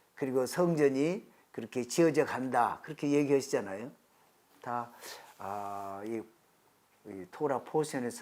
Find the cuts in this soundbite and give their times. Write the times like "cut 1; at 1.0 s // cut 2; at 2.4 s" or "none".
none